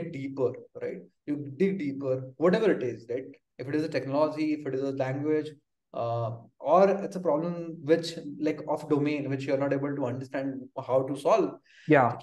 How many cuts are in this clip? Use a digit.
0